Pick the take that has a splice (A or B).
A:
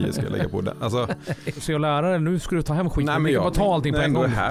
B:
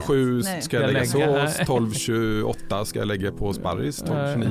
A